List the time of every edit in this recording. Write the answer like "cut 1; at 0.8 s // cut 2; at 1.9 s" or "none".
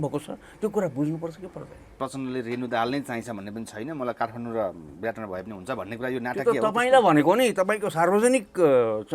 cut 1; at 2.0 s